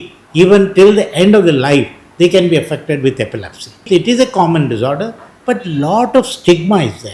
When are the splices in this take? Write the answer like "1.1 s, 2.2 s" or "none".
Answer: 3.8 s